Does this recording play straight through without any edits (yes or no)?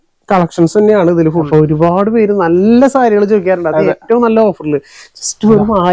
no